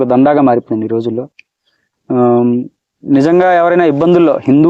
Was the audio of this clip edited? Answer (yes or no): no